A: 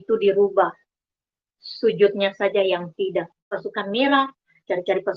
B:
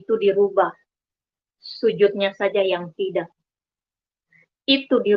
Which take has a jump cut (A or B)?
A